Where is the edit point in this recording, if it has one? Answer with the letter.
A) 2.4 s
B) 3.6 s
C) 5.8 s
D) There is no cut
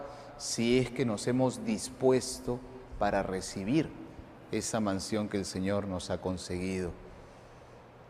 D